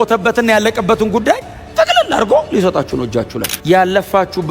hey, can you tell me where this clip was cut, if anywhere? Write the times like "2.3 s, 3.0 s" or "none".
3.5 s